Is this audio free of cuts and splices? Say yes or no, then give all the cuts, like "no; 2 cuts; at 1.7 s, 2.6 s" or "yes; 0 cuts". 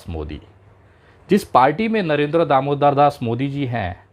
yes; 0 cuts